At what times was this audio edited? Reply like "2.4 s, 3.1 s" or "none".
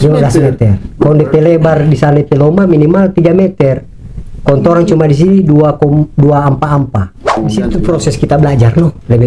7.4 s